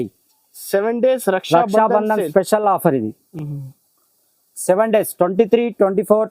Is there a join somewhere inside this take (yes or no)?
no